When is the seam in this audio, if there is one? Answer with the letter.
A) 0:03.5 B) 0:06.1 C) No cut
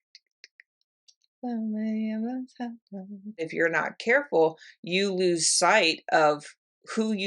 A